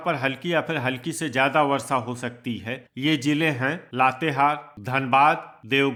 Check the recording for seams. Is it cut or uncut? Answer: uncut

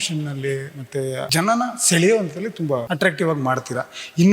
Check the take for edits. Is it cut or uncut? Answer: cut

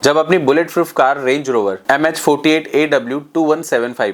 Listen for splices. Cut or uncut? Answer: uncut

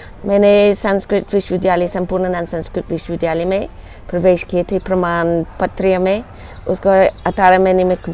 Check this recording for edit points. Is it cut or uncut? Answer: uncut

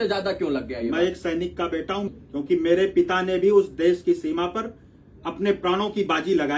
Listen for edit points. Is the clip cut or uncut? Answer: cut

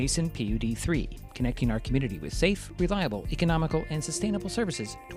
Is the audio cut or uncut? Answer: uncut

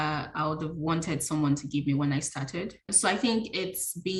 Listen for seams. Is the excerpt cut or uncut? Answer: uncut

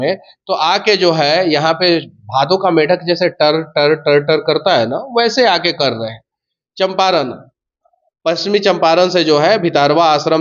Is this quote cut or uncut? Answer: uncut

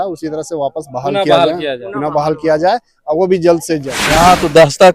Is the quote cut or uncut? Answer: cut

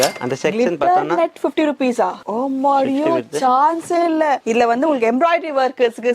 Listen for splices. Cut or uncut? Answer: cut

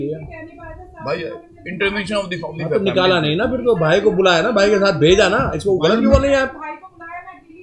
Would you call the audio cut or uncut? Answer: uncut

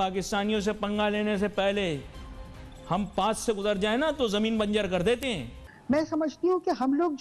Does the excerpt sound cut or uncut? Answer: cut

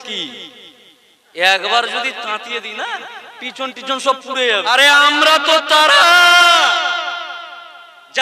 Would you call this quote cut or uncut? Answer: cut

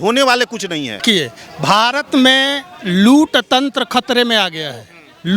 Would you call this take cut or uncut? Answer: cut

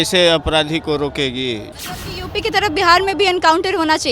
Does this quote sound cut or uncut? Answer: cut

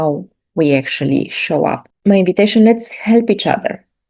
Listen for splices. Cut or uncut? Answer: cut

